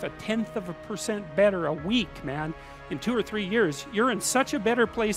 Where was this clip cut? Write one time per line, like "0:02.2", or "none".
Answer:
none